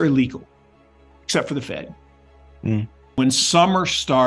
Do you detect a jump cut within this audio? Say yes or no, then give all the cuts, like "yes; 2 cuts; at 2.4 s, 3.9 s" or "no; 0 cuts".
yes; 1 cut; at 3.1 s